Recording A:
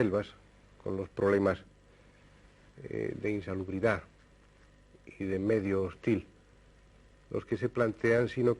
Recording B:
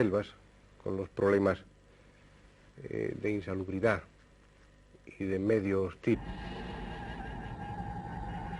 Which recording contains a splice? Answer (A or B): A